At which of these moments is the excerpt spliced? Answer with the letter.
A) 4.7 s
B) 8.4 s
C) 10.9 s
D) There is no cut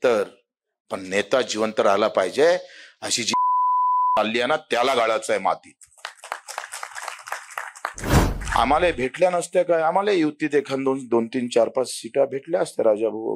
B